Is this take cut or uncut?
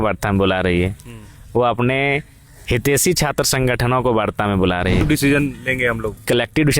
cut